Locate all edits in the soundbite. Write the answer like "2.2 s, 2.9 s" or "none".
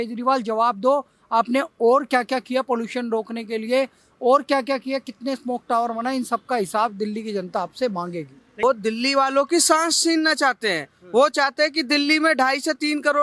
8.6 s

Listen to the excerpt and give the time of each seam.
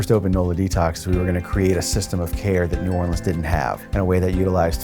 1.0 s

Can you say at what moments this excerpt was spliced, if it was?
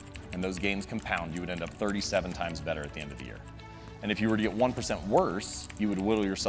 none

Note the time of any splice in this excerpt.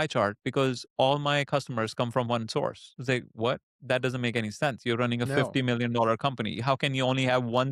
none

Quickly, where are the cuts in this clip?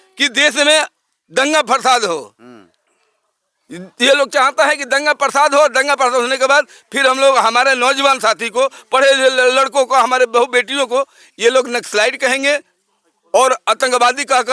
none

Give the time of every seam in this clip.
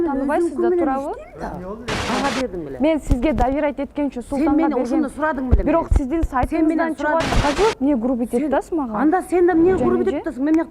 2.1 s, 7.3 s

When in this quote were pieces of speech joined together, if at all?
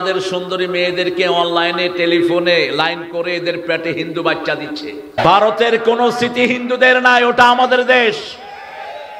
5.1 s

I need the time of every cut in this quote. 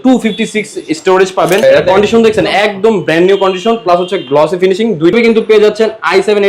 1.6 s, 5.1 s

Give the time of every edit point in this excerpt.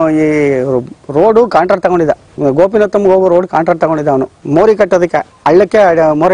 4.4 s

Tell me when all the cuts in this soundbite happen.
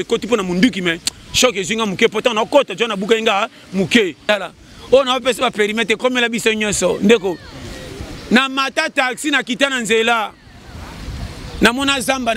4.3 s

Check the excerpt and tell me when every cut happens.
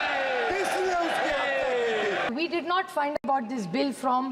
2.3 s

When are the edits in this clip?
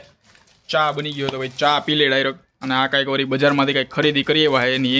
none

